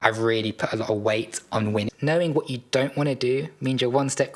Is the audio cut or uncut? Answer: cut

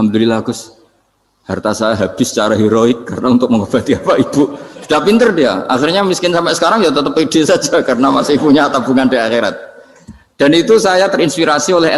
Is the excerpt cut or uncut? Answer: uncut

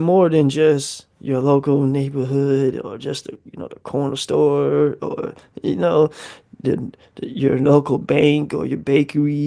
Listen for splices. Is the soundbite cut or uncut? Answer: uncut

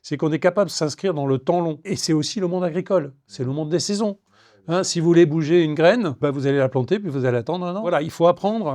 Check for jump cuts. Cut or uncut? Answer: cut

